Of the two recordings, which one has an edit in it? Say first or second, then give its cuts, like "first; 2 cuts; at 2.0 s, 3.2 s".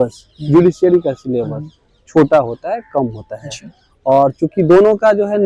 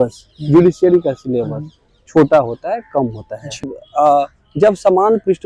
second; 1 cut; at 3.8 s